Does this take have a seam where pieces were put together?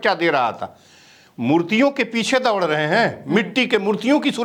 no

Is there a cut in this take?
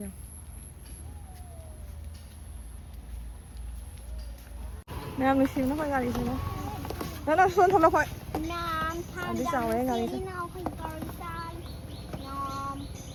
no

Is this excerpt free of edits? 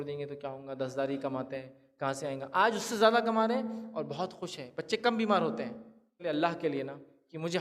no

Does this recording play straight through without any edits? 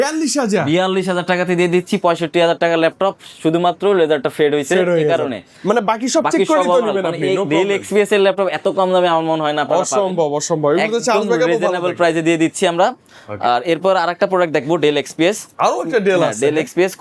yes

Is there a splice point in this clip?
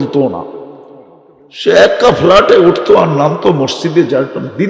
no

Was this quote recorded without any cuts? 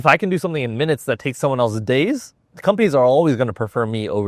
no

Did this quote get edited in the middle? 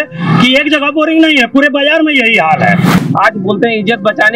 yes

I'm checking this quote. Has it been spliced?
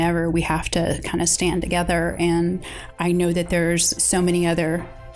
yes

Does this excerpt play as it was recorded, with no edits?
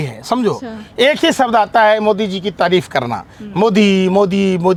yes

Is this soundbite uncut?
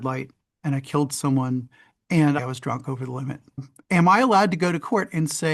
no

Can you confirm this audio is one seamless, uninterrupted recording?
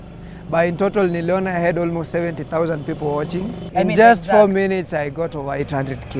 no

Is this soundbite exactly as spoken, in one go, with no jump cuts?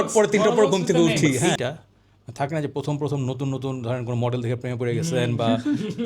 no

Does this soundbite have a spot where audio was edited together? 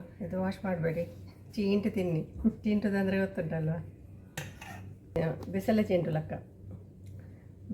yes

